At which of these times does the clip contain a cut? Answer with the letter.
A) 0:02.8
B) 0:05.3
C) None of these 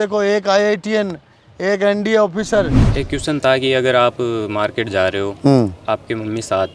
A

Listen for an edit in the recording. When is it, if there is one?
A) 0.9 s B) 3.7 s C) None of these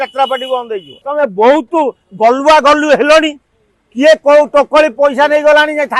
A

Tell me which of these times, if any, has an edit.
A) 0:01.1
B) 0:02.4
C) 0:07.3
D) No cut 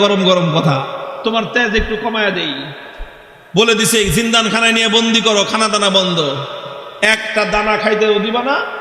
A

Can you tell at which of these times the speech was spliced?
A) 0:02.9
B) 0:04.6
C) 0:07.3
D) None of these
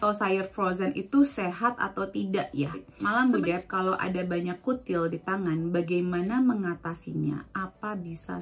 A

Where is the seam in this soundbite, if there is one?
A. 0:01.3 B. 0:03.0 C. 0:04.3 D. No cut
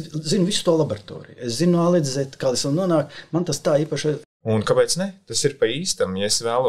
C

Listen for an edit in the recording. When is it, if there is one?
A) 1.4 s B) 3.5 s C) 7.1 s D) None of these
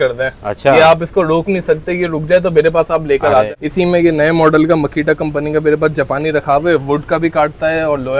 B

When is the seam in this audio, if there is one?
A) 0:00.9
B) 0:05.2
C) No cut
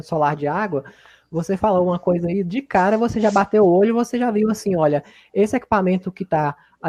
C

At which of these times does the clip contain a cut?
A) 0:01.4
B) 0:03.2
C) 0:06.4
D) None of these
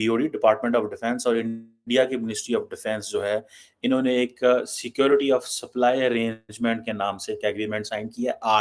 D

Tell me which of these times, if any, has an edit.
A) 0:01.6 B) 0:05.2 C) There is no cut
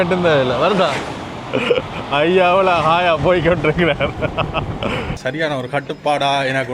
B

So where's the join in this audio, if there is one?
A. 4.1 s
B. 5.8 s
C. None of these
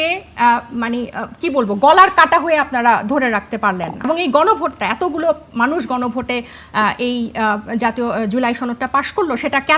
A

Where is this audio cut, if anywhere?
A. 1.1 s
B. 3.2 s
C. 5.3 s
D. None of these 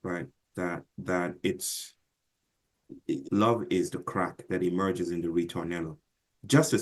B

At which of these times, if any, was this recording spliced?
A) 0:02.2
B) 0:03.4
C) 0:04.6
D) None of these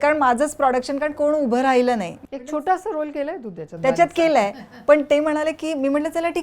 A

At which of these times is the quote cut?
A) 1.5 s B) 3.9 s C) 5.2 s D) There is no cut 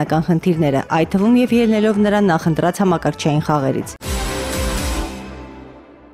B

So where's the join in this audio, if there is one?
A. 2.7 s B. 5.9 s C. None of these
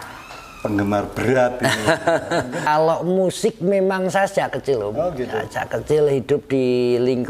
A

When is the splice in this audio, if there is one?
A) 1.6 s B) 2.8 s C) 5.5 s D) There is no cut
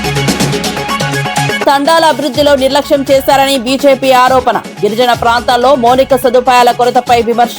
A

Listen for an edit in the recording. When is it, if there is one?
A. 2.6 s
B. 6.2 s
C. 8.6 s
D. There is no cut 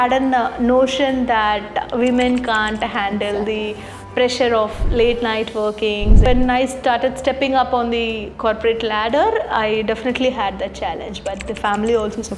B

